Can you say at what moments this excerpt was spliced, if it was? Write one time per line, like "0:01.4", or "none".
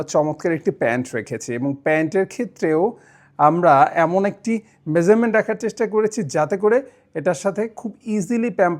none